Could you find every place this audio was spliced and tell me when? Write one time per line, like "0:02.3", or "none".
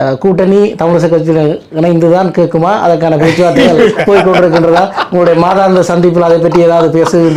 none